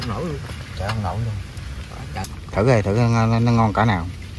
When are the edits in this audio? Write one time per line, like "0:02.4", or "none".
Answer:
0:02.3